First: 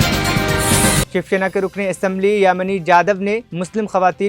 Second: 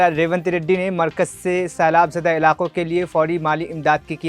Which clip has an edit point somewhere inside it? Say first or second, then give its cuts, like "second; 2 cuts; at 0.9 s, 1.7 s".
first; 1 cut; at 1.0 s